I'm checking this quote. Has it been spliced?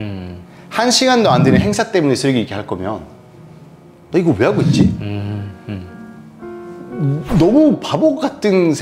no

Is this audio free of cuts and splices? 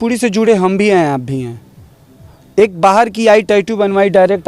yes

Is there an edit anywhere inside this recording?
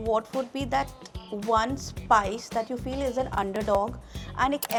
no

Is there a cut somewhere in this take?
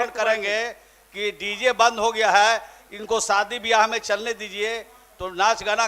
no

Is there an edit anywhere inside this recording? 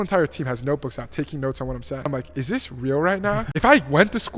yes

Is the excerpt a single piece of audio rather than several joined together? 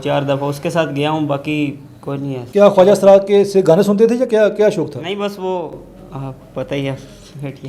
yes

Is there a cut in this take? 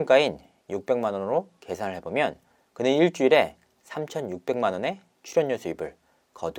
no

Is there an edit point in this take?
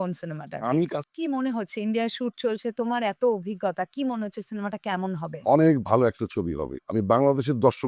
yes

